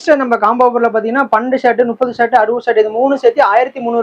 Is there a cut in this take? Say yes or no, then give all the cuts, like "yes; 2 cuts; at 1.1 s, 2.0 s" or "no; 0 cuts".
no; 0 cuts